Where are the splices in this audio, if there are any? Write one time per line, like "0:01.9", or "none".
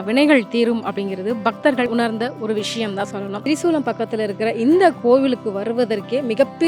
0:01.9
0:03.4